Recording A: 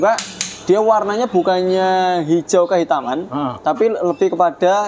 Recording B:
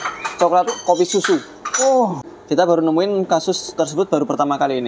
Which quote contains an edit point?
B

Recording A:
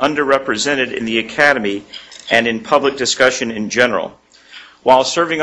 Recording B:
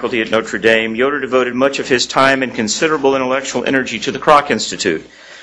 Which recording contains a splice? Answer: B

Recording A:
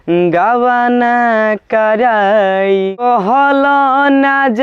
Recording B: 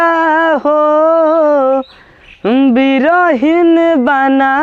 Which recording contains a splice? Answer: A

